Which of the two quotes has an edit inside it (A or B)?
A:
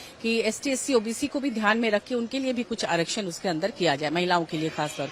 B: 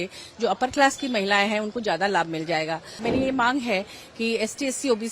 B